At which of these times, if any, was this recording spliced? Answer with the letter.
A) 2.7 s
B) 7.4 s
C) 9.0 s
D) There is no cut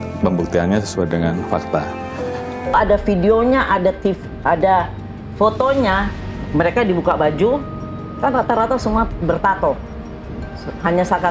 A